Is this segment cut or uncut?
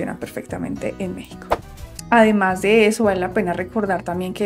cut